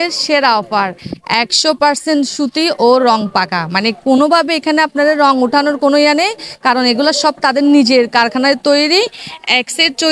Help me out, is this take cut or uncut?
uncut